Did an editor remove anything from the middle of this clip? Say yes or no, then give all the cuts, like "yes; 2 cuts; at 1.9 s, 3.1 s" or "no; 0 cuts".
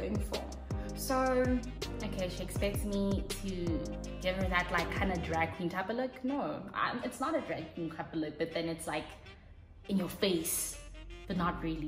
no; 0 cuts